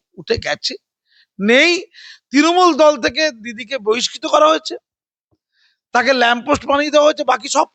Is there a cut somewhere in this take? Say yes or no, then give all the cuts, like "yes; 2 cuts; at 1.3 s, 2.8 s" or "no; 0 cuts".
no; 0 cuts